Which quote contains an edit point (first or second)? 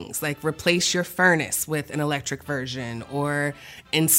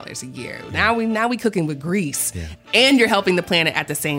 second